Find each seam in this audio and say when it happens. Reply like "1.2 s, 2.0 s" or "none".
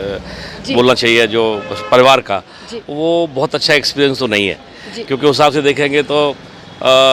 none